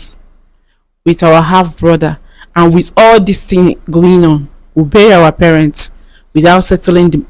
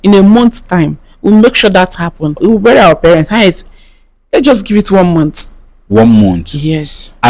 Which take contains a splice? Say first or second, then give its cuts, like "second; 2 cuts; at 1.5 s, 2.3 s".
second; 1 cut; at 2.4 s